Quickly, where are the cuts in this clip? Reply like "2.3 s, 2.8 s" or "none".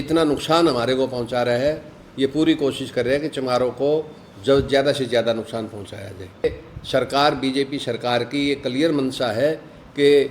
6.4 s